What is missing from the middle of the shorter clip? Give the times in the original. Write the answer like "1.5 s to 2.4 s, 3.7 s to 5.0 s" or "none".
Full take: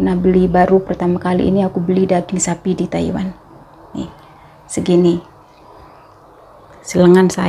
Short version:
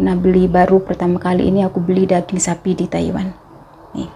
none